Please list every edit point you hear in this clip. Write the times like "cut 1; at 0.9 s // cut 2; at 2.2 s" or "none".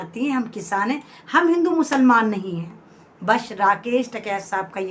none

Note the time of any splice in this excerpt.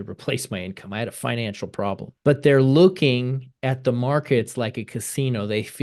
cut 1; at 2.1 s

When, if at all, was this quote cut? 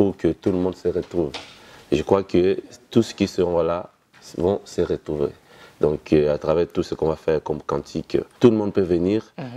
cut 1; at 8.3 s

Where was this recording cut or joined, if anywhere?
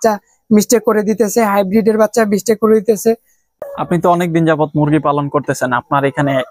cut 1; at 3.6 s

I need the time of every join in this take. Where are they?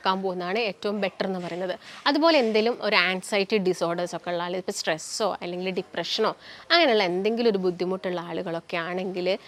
none

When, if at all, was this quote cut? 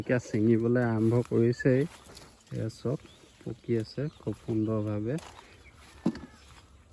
cut 1; at 2.2 s

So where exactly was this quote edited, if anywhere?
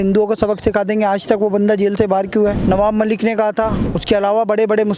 cut 1; at 2.6 s // cut 2; at 3.9 s

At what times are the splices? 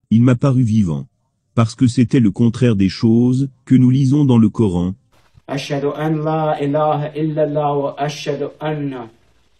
cut 1; at 5.0 s

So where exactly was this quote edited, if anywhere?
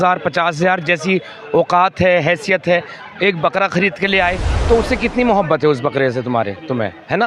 cut 1; at 4.5 s

